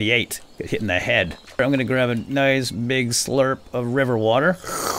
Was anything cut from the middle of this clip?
yes; 1 cut; at 1.4 s

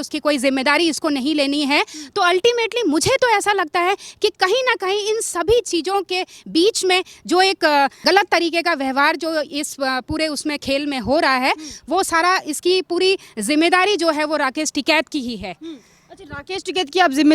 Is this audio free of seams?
yes; 0 cuts

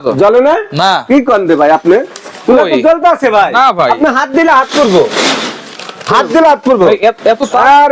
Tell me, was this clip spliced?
no; 0 cuts

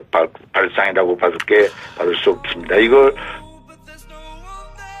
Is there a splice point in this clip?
yes; 1 cut; at 3.3 s

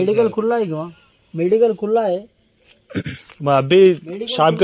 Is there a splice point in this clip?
no; 0 cuts

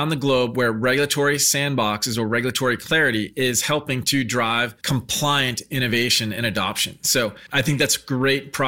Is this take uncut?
no; 2 cuts; at 4.8 s, 7.4 s

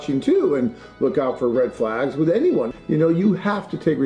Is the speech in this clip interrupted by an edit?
yes; 1 cut; at 2.7 s

